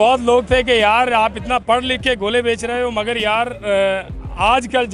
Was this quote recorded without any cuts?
yes; 0 cuts

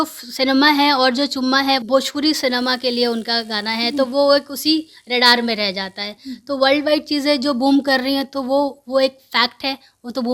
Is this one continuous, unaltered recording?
no; 1 cut; at 1.8 s

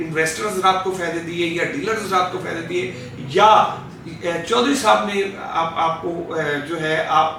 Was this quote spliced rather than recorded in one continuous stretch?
no; 0 cuts

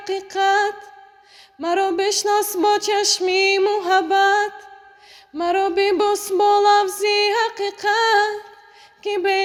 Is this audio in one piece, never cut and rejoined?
yes; 0 cuts

